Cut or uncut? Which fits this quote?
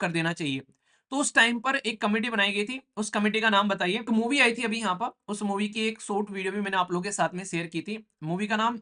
cut